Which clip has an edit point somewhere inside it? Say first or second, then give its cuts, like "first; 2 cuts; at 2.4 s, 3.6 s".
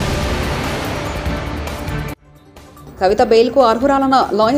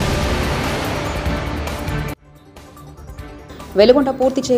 second; 1 cut; at 2.8 s